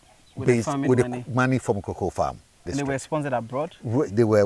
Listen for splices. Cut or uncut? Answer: cut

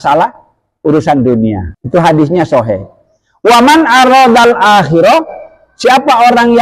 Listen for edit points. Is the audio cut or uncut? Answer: cut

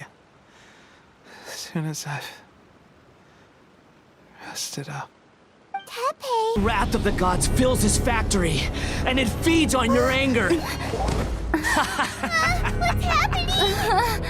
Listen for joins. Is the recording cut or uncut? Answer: cut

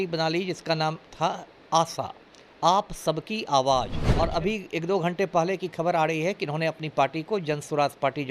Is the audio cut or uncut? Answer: cut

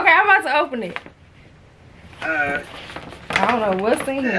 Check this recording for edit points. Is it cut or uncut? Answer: uncut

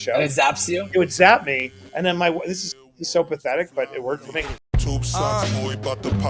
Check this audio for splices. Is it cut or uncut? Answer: cut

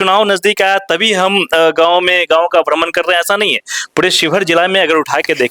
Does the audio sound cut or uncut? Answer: uncut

